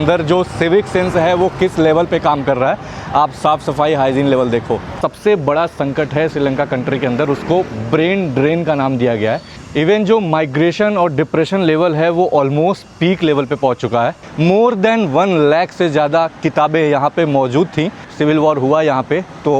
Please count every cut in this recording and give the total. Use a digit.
4